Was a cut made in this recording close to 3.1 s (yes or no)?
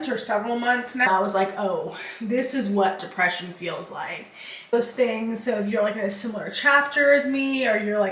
no